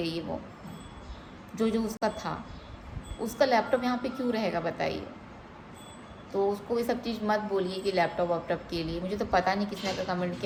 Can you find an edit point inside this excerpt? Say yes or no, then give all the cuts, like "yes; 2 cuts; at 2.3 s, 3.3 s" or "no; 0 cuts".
no; 0 cuts